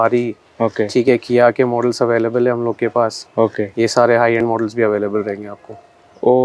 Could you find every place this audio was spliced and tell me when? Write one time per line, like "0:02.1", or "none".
none